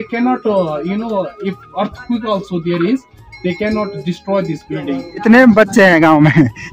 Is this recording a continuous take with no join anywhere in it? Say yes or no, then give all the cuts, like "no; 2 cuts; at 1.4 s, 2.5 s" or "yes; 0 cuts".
no; 1 cut; at 5.2 s